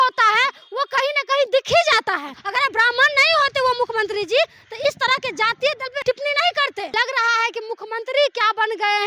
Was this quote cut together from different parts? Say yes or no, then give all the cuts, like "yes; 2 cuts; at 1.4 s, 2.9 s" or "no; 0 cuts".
yes; 3 cuts; at 2.3 s, 6.0 s, 6.9 s